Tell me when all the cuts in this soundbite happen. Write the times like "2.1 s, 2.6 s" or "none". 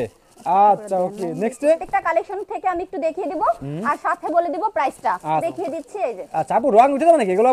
1.8 s, 5.4 s